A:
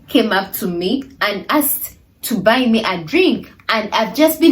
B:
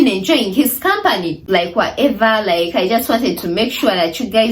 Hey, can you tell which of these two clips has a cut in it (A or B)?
B